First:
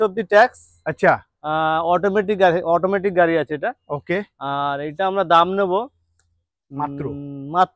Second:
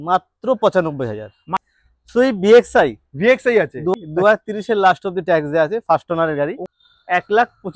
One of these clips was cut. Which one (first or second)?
second